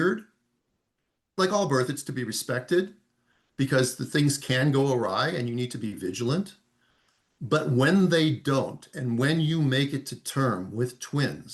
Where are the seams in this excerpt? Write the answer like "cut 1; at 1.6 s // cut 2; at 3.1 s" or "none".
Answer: cut 1; at 1.3 s